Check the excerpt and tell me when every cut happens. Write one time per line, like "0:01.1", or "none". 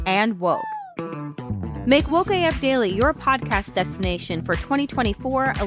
none